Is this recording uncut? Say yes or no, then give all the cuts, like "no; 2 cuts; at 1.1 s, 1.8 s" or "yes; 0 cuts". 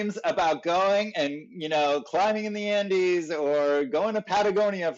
yes; 0 cuts